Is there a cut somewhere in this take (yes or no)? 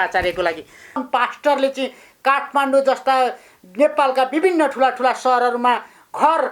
yes